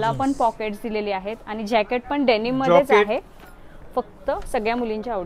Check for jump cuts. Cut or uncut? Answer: uncut